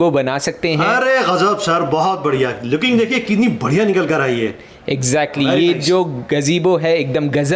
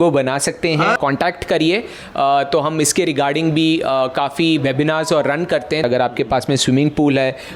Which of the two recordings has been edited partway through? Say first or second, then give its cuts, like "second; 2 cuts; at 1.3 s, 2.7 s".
second; 2 cuts; at 1.0 s, 5.8 s